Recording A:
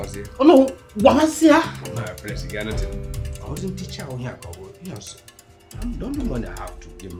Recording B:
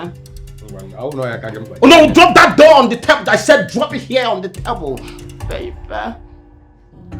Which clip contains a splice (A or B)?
B